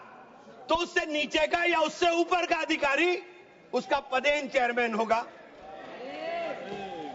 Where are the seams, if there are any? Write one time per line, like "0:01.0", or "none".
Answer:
none

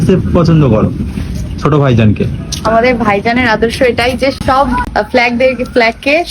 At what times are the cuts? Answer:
0:04.4

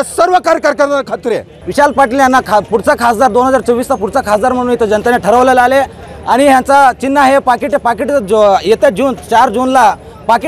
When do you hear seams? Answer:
0:01.5

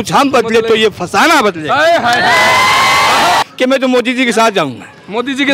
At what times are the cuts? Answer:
0:03.4

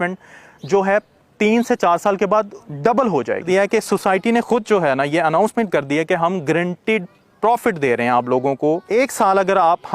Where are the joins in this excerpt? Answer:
0:03.4
0:08.8

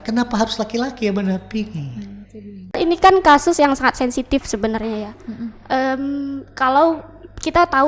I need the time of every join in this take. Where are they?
0:02.8

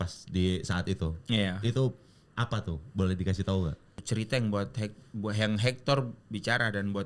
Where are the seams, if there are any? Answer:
0:04.0

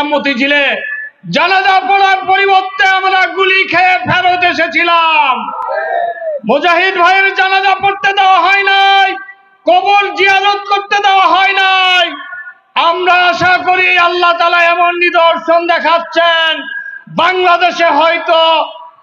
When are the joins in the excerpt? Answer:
none

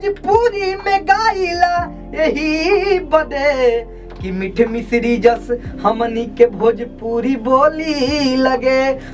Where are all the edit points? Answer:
none

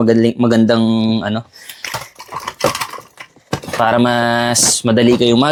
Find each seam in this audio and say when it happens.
none

